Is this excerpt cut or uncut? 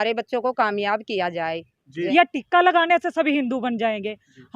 cut